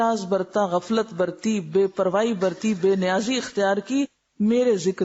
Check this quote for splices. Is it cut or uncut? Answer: uncut